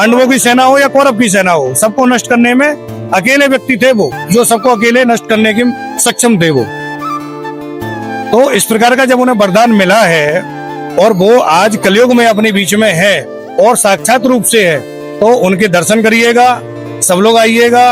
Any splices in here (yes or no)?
no